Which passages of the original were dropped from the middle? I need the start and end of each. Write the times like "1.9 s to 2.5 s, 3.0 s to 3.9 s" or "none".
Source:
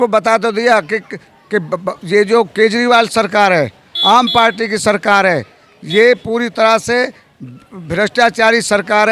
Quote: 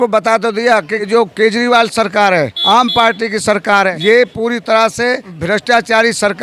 1.1 s to 2.3 s, 3.7 s to 3.9 s, 5.3 s to 5.8 s, 7.2 s to 7.8 s